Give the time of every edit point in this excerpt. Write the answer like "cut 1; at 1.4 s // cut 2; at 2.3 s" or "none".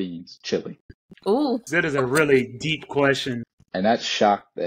cut 1; at 1.6 s // cut 2; at 3.3 s

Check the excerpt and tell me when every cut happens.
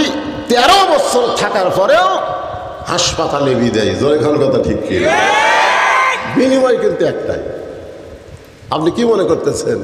none

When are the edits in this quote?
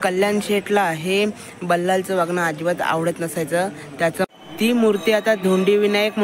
cut 1; at 4.3 s

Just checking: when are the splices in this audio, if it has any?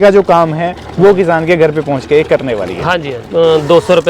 cut 1; at 3.2 s

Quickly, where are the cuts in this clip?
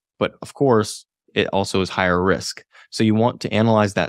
none

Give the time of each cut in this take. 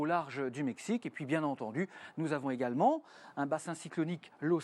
cut 1; at 1.4 s

